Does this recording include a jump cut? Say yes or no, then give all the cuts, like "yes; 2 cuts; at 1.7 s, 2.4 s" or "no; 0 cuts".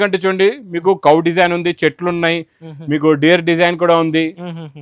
no; 0 cuts